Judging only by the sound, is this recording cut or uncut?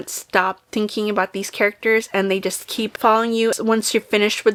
uncut